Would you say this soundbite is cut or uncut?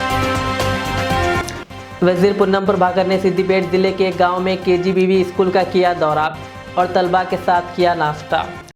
cut